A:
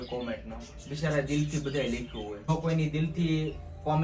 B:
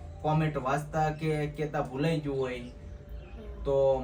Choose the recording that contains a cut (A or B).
A